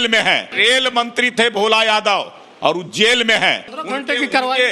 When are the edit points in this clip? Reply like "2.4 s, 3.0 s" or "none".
3.7 s

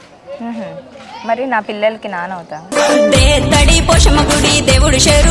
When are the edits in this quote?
none

